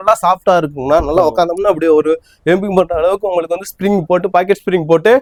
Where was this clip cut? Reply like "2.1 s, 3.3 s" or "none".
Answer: none